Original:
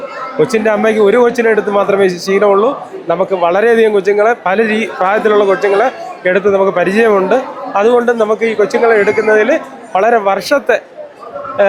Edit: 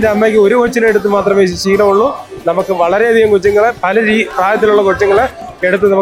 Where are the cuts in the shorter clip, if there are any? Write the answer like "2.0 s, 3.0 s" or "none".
none